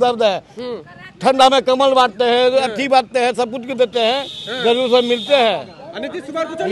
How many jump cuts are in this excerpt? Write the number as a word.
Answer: zero